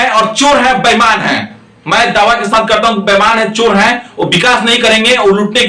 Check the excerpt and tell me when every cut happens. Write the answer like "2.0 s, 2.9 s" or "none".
none

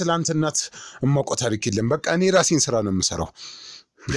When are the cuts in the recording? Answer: none

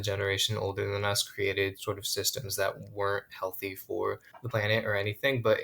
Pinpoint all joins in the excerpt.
4.3 s

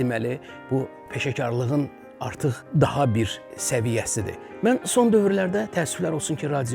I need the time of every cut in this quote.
1.0 s, 2.6 s, 4.4 s

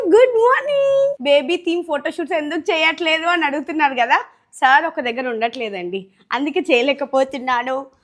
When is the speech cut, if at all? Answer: 1.2 s

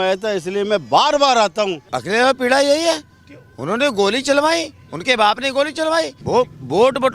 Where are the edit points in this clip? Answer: 1.9 s, 6.2 s

